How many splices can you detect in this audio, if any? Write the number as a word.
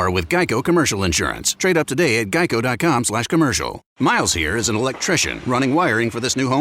one